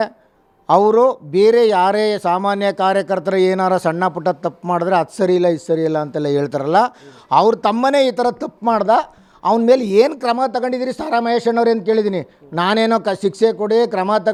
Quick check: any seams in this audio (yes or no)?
no